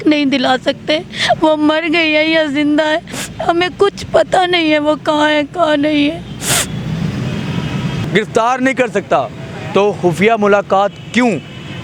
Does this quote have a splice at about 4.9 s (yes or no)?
no